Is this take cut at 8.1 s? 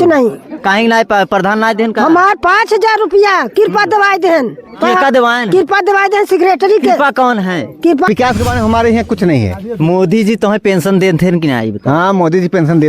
yes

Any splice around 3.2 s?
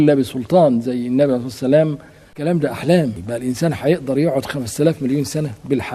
yes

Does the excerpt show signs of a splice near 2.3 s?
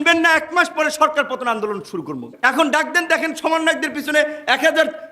yes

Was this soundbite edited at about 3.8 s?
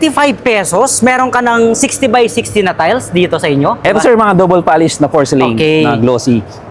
yes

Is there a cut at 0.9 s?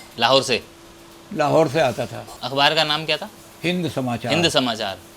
no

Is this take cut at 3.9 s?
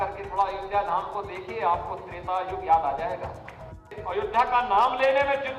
yes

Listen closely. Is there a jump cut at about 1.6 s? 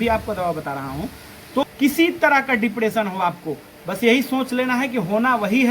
yes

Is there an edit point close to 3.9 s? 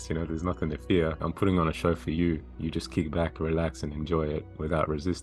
no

